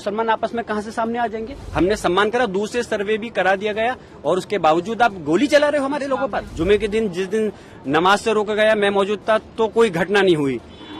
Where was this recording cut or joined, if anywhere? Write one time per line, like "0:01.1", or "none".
0:01.6
0:06.5